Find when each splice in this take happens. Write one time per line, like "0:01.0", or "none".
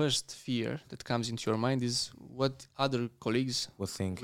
none